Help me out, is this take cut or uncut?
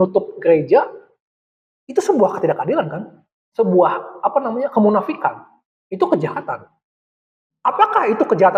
uncut